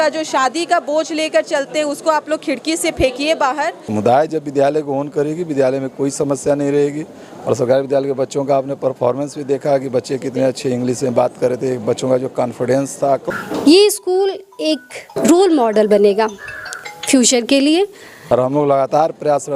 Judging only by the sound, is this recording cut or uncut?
cut